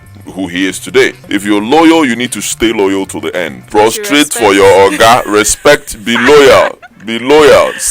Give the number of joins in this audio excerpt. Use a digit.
2